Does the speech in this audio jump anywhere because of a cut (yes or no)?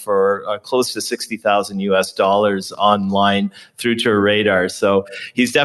no